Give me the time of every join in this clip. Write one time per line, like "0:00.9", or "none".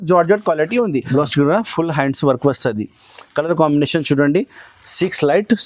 0:01.0